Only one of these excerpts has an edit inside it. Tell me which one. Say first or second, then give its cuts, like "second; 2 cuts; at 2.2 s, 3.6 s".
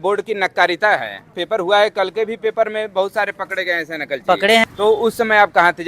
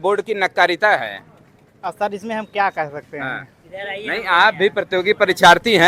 first; 2 cuts; at 1.4 s, 4.6 s